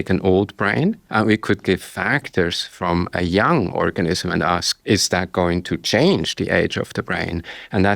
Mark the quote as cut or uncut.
cut